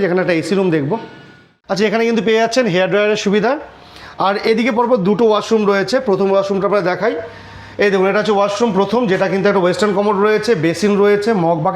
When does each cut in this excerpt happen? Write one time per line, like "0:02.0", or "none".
0:01.5